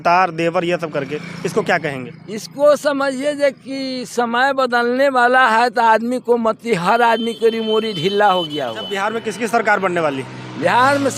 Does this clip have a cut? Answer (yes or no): yes